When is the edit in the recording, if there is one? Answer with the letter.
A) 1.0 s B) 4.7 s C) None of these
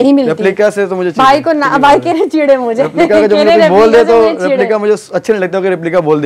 C